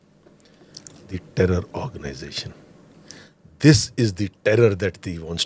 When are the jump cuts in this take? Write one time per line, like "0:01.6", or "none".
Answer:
none